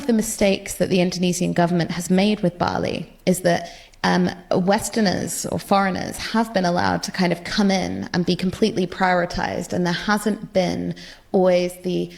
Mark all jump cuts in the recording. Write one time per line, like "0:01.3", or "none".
none